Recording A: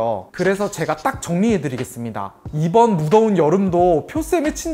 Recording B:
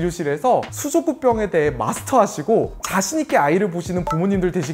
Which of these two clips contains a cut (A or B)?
A